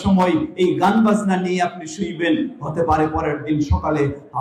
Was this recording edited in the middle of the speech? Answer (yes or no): no